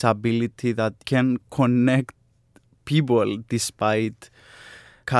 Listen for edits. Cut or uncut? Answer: cut